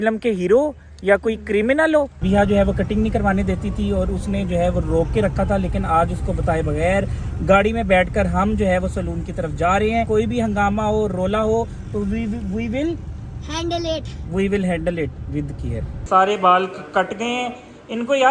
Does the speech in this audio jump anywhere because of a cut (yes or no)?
yes